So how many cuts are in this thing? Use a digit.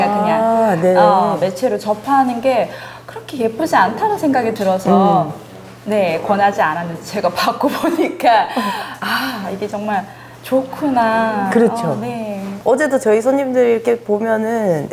0